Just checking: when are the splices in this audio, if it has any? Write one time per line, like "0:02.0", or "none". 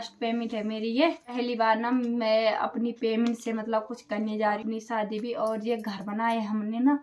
0:01.3
0:04.6